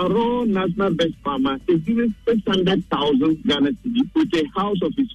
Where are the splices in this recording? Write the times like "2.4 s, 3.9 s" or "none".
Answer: 4.1 s